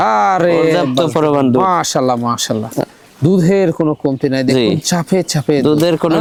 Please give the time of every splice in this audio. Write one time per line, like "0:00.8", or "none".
none